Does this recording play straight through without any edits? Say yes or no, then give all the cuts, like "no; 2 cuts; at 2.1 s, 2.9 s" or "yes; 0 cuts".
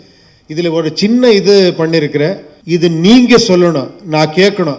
no; 1 cut; at 2.5 s